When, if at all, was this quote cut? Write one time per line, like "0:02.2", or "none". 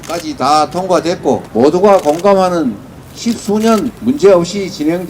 0:01.5
0:03.9